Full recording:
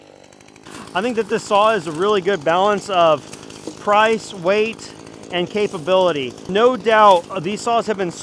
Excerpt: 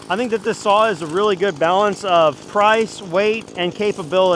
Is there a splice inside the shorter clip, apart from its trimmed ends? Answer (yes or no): yes